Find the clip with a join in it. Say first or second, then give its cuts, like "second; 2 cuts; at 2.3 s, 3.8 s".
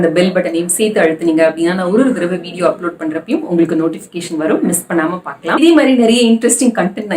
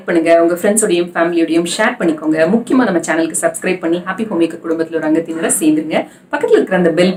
first; 1 cut; at 5.6 s